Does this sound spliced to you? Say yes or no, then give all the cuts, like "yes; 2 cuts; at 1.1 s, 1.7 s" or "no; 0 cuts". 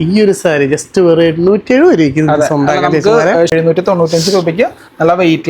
yes; 1 cut; at 3.5 s